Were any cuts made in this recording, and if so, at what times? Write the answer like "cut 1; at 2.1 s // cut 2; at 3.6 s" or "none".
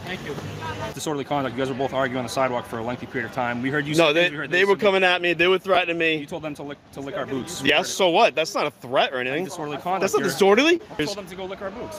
cut 1; at 0.9 s // cut 2; at 11.0 s